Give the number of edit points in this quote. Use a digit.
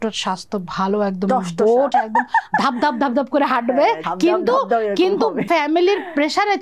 3